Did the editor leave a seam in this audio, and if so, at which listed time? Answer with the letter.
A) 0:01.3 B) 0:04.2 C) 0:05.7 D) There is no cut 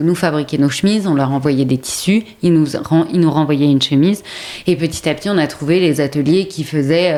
D